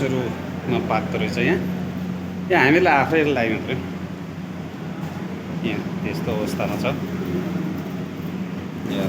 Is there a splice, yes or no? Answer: no